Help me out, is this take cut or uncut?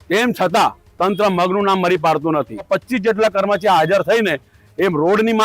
cut